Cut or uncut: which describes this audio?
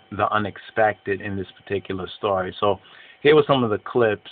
uncut